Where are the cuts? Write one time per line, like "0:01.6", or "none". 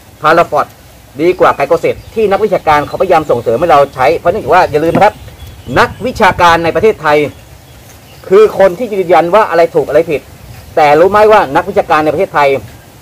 none